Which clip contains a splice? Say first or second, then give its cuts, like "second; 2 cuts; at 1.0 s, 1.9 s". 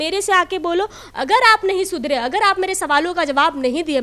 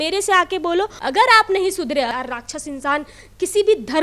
second; 2 cuts; at 1.0 s, 2.1 s